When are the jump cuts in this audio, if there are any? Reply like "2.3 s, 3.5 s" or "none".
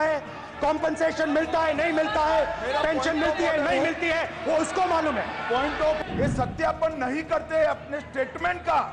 6.0 s